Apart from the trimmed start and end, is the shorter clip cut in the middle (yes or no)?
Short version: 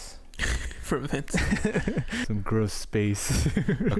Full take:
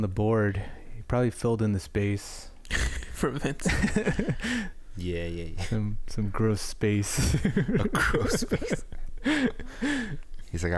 yes